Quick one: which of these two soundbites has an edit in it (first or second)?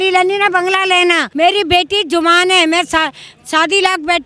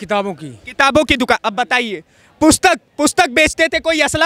first